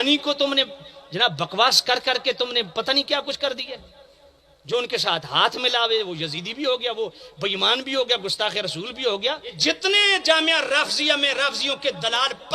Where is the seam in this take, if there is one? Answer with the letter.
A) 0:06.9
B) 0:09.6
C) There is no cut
B